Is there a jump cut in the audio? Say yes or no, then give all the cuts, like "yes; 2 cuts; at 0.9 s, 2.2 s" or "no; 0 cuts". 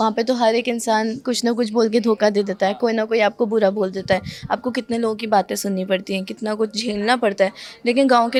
no; 0 cuts